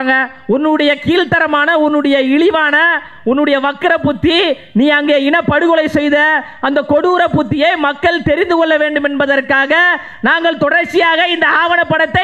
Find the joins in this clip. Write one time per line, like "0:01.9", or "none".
none